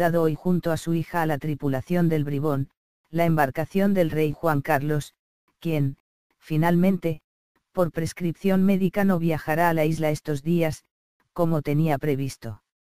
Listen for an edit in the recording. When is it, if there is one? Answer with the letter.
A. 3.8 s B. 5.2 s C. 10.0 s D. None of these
A